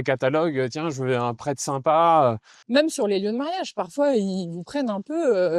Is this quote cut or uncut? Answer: cut